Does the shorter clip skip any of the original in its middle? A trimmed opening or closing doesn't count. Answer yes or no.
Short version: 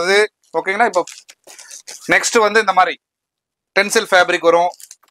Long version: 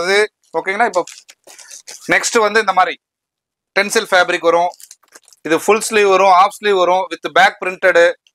no